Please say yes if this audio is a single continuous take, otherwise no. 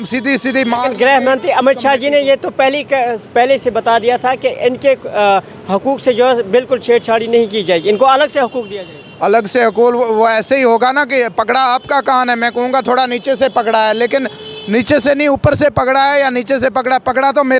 yes